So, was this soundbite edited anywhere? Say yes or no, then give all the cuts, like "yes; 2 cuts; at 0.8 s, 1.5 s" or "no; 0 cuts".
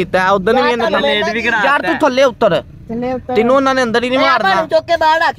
no; 0 cuts